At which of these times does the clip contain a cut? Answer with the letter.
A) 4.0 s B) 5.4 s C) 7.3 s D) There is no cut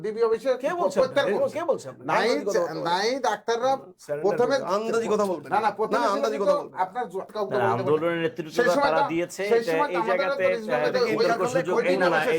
C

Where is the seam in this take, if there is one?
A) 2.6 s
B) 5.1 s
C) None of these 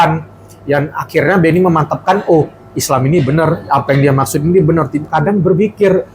B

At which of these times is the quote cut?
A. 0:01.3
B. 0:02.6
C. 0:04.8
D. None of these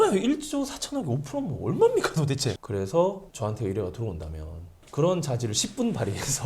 B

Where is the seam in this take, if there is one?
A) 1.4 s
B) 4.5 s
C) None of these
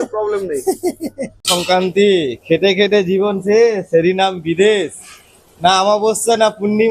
A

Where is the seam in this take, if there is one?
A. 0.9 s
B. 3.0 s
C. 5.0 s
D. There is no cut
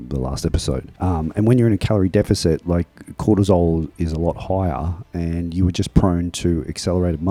D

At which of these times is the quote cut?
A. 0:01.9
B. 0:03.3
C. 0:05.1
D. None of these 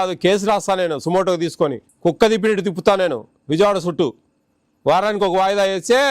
A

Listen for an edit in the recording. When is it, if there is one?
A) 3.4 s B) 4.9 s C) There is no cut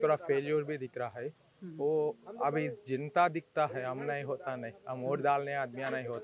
C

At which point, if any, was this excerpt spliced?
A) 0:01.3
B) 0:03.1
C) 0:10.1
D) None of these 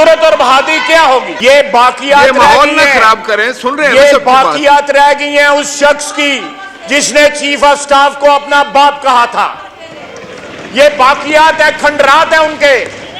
A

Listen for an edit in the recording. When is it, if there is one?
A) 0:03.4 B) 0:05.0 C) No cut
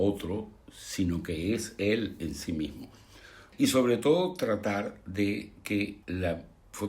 A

